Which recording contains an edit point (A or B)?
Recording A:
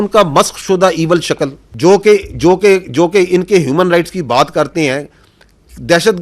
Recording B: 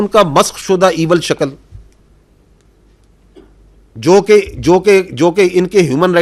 A